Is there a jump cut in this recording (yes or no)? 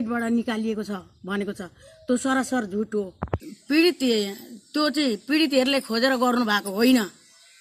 yes